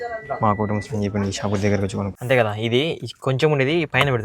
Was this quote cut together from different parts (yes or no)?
yes